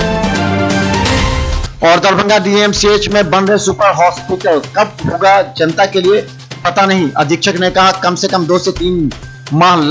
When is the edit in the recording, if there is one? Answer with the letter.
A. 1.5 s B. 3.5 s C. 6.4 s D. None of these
A